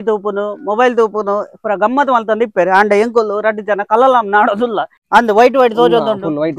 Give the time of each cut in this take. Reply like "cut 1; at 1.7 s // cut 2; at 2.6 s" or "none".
cut 1; at 4.9 s